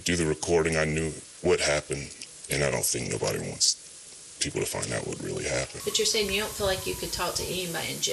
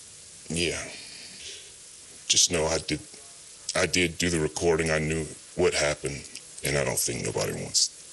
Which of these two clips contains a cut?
first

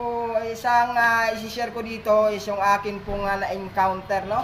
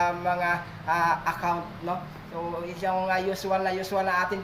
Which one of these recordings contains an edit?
second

